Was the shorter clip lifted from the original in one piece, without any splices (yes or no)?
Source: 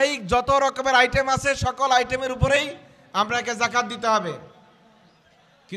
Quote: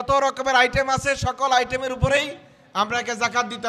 yes